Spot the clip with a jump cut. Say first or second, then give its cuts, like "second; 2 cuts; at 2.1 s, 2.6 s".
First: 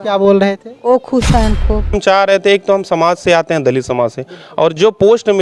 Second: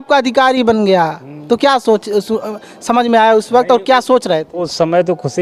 first; 1 cut; at 1.9 s